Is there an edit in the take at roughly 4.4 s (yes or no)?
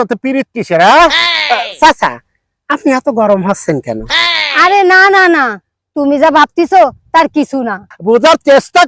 yes